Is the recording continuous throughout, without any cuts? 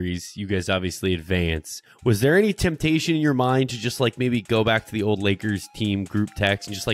yes; 0 cuts

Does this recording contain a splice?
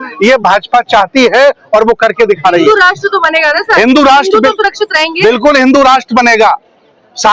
no; 0 cuts

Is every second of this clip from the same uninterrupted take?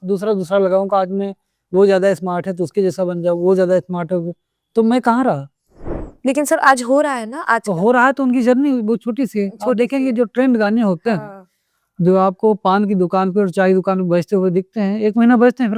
yes; 0 cuts

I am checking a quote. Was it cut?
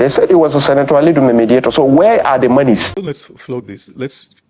yes; 1 cut; at 3.3 s

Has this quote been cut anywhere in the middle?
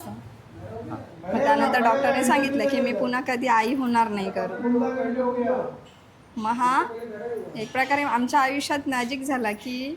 no; 0 cuts

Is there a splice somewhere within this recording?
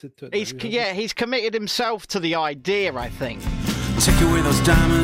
yes; 1 cut; at 3.5 s

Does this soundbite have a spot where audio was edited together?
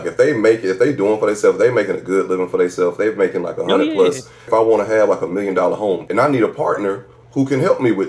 yes; 3 cuts; at 4.5 s, 6.0 s, 7.2 s

